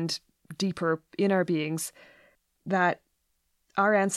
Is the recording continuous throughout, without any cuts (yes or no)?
yes